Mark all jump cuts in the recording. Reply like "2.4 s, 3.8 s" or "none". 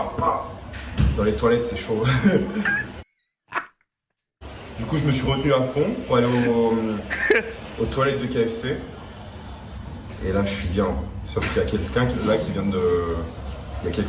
none